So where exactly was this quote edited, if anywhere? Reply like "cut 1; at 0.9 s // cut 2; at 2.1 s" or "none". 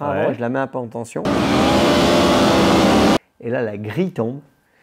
cut 1; at 1.1 s // cut 2; at 3.2 s